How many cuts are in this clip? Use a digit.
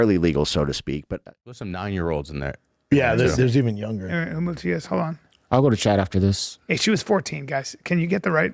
1